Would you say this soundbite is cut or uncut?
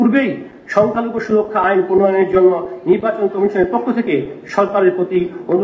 uncut